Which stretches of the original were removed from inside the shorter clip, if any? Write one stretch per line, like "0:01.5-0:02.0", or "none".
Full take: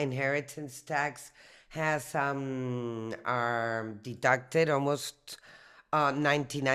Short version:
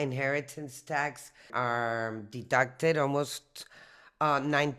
0:01.4-0:03.2

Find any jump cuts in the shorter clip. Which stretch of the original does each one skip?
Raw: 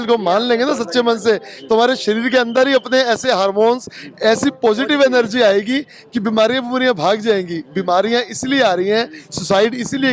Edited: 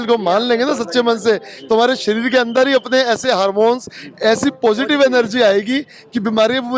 none

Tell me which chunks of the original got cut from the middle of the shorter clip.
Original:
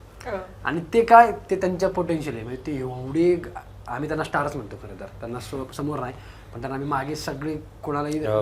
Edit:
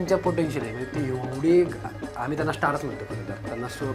none

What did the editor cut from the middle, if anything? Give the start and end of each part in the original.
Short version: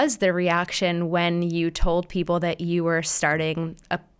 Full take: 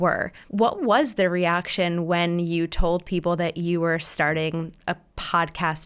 none

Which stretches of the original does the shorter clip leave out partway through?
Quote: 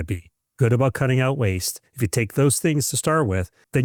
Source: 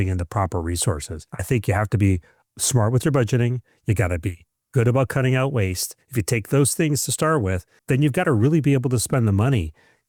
none

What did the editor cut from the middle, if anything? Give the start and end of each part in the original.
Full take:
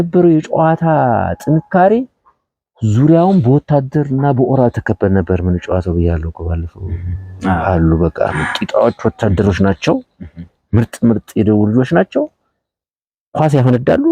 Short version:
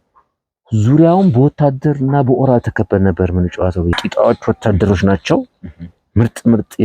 0:06.0-0:08.5

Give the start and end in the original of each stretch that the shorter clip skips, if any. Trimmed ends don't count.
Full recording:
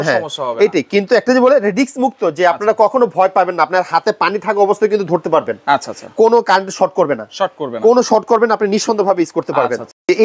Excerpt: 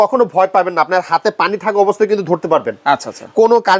none

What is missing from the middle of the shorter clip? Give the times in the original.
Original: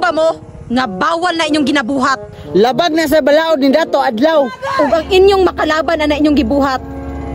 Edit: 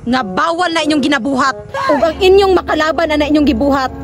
0:02.3-0:04.6

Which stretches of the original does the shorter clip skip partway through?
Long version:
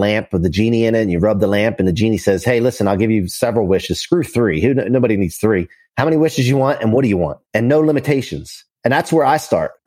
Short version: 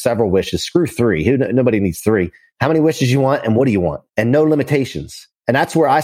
none

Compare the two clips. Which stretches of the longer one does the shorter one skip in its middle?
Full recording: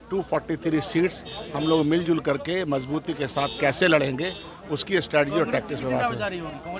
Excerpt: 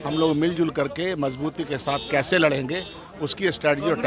none

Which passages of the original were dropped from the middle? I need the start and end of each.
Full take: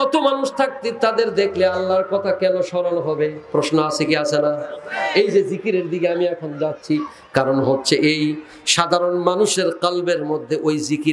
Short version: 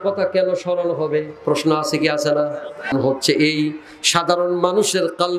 0:05.0-0:07.5

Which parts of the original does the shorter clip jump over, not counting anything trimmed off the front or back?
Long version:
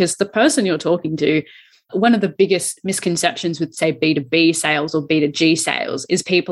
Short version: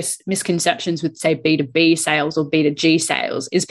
none

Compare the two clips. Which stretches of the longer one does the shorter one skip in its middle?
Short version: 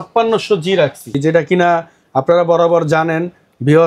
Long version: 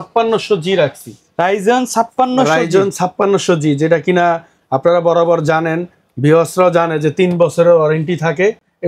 0:01.2-0:03.8

